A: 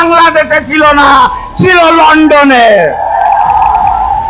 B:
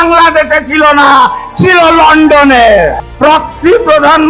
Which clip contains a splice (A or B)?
B